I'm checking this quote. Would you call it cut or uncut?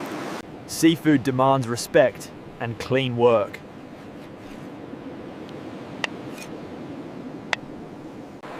uncut